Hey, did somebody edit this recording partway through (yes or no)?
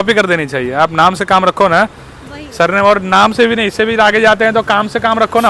no